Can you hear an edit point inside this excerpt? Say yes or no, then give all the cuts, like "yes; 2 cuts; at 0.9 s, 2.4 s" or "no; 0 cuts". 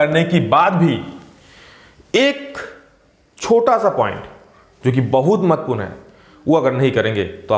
no; 0 cuts